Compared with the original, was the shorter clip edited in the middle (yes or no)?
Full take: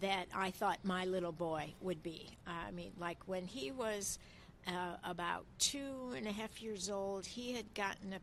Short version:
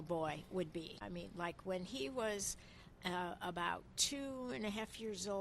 yes